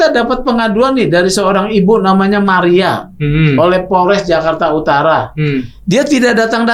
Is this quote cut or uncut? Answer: uncut